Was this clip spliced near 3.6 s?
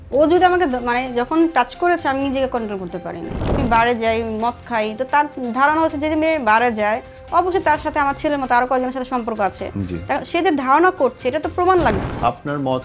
yes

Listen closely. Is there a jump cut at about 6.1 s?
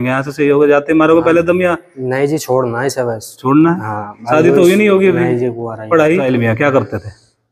yes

